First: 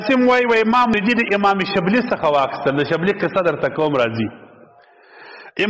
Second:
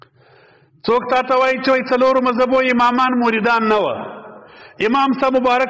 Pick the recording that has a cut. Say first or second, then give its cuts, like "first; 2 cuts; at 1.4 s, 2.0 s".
first; 1 cut; at 0.9 s